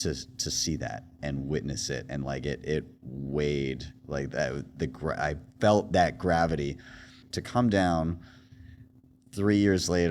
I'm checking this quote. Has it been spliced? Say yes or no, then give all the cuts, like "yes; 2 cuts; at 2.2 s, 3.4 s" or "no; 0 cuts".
yes; 1 cut; at 7.2 s